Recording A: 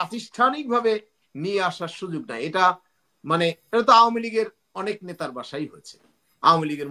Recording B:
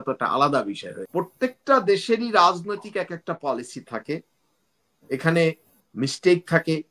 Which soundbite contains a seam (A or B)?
B